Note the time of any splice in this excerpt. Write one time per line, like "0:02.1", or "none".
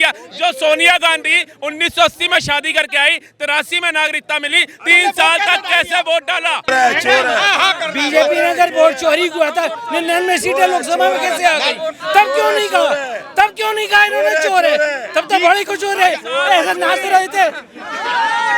0:06.7